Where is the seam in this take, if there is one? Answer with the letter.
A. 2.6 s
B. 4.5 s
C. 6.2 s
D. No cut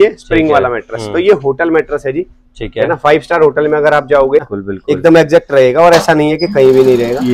B